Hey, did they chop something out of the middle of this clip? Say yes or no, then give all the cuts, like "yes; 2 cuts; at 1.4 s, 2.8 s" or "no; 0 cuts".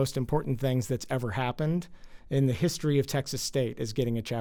no; 0 cuts